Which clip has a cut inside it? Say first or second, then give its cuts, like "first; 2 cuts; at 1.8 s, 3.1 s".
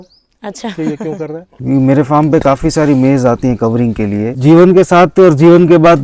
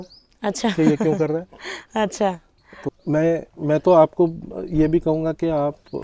first; 2 cuts; at 1.5 s, 4.3 s